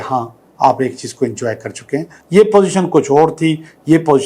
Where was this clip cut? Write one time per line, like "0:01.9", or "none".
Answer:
0:02.2